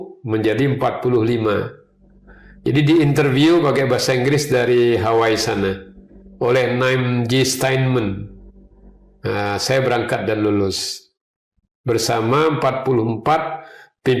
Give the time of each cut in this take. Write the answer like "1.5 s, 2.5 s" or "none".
none